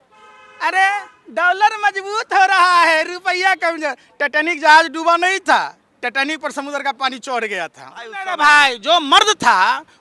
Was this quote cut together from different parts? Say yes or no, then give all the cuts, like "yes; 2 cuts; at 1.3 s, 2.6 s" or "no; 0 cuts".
yes; 1 cut; at 8.3 s